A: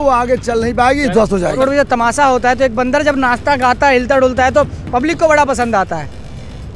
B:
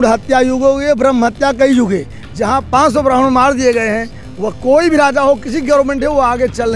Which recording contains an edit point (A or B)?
A